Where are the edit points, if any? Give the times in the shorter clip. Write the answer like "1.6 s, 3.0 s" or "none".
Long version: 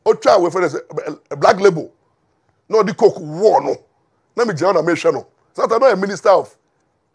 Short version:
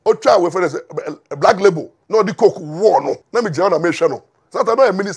1.9 s, 3.2 s